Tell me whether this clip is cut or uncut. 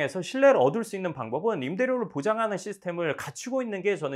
uncut